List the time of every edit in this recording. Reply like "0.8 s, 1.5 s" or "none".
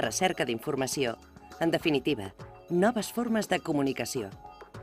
none